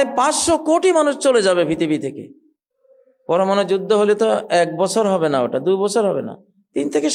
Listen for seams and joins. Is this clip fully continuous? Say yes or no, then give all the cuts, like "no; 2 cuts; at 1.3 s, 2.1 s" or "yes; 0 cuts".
yes; 0 cuts